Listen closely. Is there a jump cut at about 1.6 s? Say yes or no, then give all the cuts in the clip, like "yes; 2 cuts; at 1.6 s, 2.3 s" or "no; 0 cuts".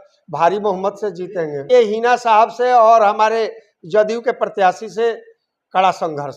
yes; 1 cut; at 1.6 s